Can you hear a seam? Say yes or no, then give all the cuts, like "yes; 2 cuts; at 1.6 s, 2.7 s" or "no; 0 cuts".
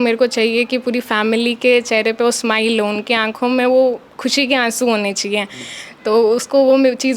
no; 0 cuts